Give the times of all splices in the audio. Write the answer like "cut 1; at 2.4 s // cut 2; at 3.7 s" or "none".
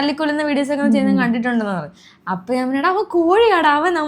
none